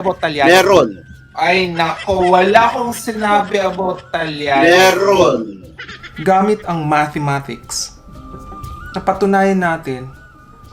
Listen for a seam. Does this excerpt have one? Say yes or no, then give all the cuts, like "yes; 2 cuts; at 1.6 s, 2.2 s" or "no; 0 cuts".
yes; 1 cut; at 0.9 s